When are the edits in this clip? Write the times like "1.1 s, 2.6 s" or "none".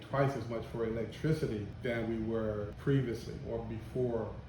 1.7 s, 2.7 s